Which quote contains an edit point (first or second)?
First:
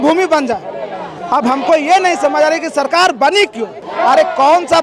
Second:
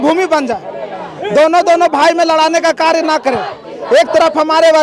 first